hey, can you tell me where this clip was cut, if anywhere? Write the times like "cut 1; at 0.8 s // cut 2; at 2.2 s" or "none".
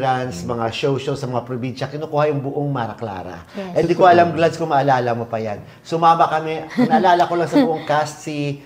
none